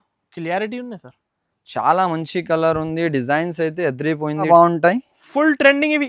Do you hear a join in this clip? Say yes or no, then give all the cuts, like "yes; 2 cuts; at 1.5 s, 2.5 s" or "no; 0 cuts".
yes; 1 cut; at 4.5 s